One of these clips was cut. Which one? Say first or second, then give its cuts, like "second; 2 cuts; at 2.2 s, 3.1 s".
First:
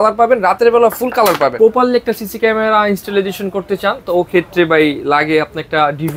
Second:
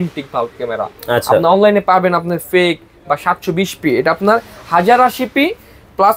first; 1 cut; at 1.5 s